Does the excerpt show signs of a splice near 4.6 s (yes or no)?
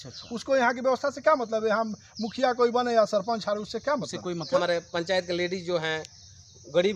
yes